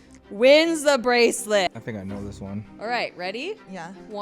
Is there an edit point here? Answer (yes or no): yes